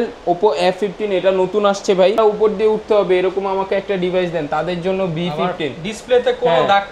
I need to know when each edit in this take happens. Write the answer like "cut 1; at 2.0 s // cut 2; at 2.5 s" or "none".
cut 1; at 2.2 s